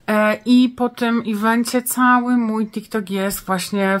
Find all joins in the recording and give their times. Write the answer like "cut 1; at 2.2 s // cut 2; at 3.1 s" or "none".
none